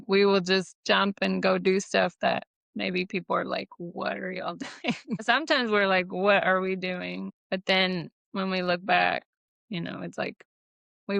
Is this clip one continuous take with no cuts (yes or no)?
no